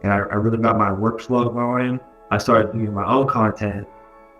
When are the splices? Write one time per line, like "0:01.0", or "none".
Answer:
0:02.1